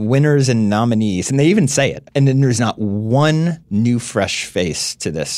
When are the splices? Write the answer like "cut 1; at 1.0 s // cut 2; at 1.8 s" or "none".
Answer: cut 1; at 2.0 s // cut 2; at 3.6 s